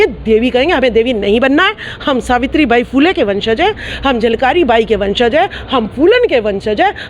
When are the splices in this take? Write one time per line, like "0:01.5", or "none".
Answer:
none